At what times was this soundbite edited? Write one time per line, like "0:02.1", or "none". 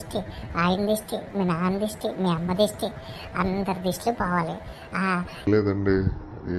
0:05.5